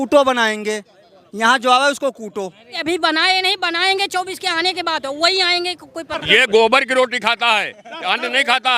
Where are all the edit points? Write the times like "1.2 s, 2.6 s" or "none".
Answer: 2.8 s, 6.2 s